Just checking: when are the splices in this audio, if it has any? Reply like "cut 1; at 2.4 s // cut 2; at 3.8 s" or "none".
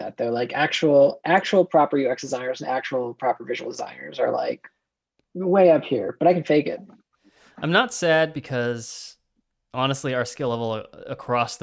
none